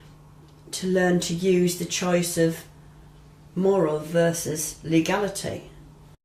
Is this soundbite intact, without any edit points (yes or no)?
yes